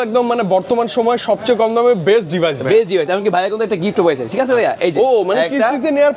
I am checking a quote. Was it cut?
no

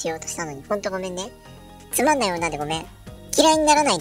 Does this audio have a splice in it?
no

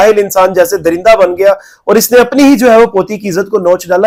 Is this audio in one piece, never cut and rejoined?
yes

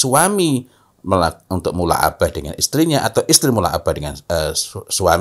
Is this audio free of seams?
yes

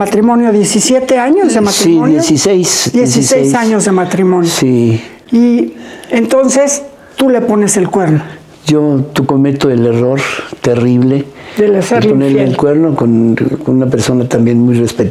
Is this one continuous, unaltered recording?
yes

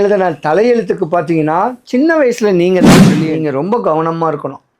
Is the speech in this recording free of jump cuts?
no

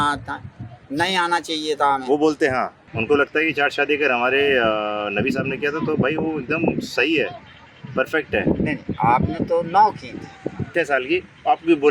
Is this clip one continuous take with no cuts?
no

